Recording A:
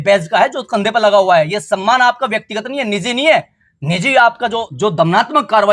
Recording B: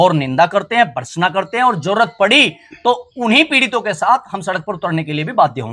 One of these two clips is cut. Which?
A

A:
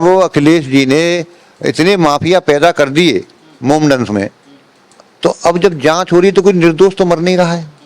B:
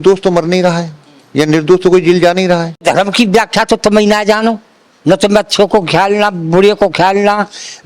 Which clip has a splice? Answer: B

